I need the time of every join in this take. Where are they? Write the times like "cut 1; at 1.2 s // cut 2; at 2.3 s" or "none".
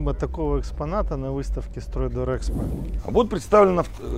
cut 1; at 2.8 s